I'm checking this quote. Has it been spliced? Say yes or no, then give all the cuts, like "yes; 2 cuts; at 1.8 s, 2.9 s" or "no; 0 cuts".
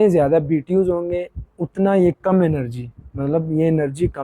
no; 0 cuts